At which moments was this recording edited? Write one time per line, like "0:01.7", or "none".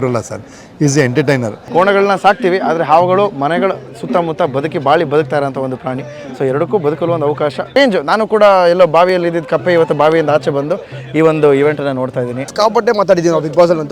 0:01.6
0:07.8
0:12.5